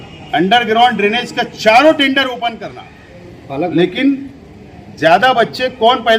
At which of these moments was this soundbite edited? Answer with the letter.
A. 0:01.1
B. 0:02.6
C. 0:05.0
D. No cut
B